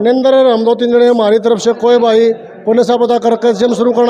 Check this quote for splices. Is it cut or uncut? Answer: uncut